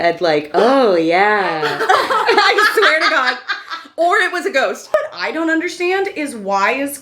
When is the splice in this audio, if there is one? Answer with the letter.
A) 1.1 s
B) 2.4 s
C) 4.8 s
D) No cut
C